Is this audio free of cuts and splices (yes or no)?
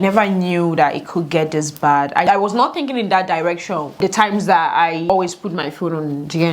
no